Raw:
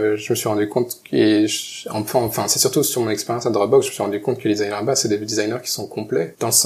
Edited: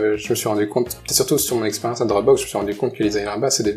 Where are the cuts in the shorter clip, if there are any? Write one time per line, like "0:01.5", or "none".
0:01.0